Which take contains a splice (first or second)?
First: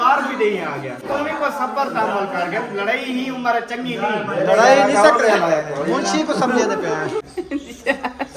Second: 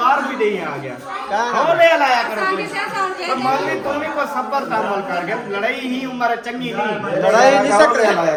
first